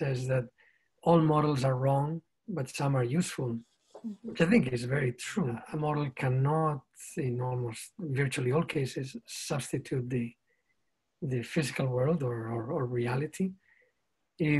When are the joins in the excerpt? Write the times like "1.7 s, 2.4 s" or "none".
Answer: 5.6 s